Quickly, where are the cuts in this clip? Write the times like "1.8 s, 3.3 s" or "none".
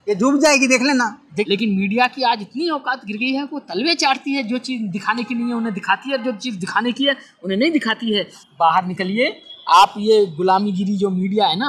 1.5 s, 8.4 s